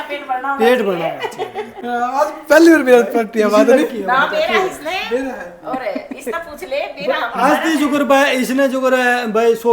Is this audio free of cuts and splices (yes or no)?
yes